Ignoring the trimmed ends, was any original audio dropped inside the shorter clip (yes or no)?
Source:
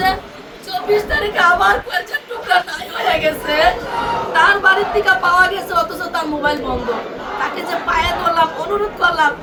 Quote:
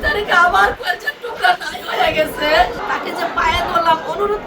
yes